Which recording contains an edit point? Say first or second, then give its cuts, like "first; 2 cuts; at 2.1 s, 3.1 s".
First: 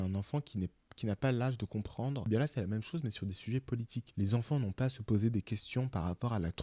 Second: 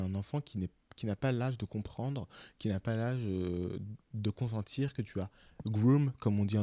first; 2 cuts; at 2.3 s, 4.0 s